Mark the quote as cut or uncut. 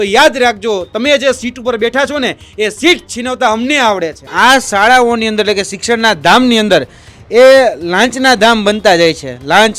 cut